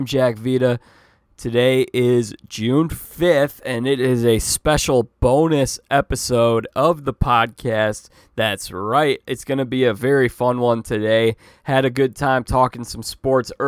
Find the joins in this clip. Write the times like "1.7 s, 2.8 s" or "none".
none

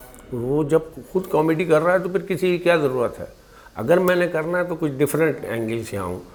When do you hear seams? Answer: none

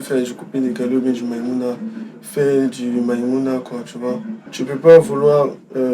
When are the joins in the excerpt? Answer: 4.4 s

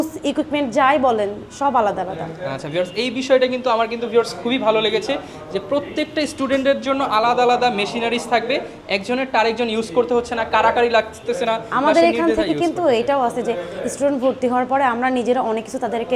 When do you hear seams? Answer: none

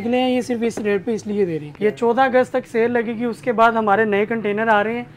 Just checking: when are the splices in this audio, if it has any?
1.7 s

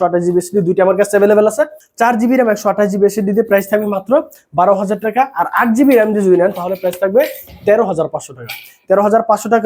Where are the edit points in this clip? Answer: none

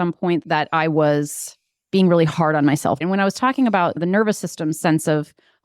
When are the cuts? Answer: 3.0 s, 4.0 s

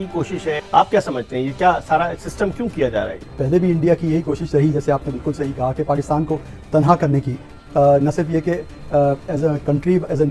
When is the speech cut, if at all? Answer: none

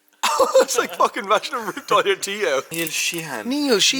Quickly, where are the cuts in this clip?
2.7 s

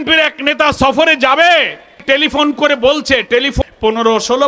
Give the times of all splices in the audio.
2.0 s, 3.5 s

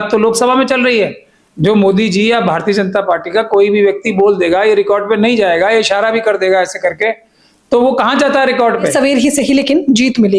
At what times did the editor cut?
8.9 s

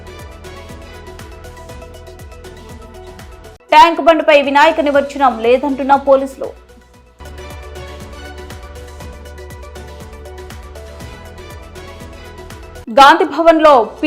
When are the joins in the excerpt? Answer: 1.7 s

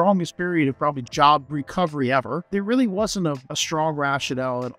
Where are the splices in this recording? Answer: 1.0 s, 2.4 s, 3.5 s

